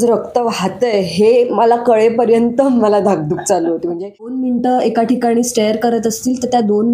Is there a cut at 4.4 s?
yes; 1 cut; at 4.4 s

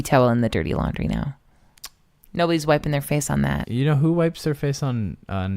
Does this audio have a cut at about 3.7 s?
yes; 1 cut; at 3.7 s

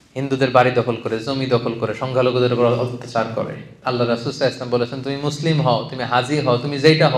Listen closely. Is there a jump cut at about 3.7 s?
yes; 1 cut; at 3.7 s

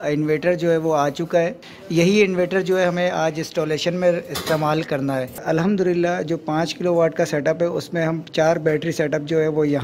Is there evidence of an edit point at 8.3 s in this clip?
no; 2 cuts; at 1.6 s, 5.4 s

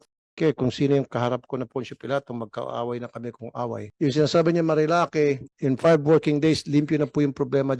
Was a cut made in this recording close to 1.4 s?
no; 2 cuts; at 3.8 s, 5.5 s

